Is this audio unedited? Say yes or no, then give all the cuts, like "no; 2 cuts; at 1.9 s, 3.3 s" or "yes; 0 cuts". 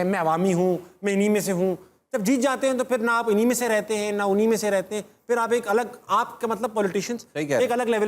yes; 0 cuts